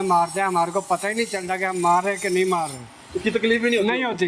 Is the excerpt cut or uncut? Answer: uncut